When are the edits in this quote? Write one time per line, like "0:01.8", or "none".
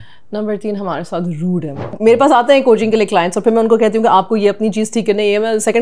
0:01.9